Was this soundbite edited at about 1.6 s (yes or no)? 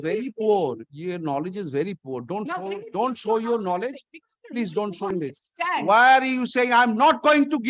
no